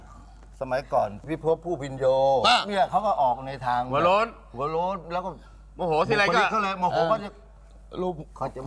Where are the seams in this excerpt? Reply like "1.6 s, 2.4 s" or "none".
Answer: 1.2 s